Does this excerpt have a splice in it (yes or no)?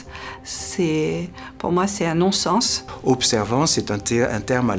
yes